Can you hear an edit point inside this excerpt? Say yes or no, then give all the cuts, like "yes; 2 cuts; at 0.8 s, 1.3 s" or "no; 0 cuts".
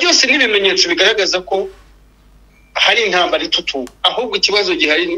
no; 0 cuts